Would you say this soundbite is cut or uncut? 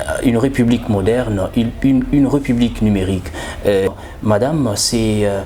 cut